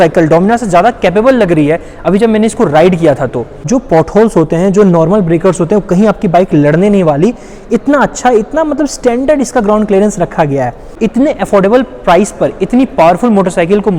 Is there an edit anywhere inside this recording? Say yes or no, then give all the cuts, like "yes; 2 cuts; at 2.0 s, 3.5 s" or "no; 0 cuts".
yes; 2 cuts; at 3.5 s, 10.8 s